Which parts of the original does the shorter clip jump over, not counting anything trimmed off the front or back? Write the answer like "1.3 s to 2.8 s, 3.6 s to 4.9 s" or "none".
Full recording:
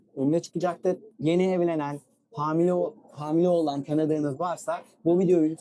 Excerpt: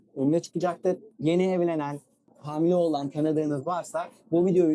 2.3 s to 3.0 s